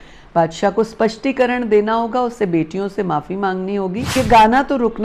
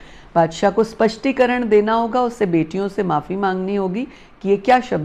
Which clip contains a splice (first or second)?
first